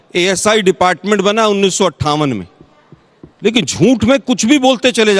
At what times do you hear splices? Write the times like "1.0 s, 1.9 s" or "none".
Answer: none